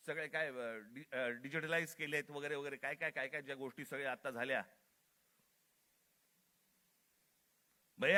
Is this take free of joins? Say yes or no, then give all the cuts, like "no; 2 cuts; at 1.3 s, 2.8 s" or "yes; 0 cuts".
yes; 0 cuts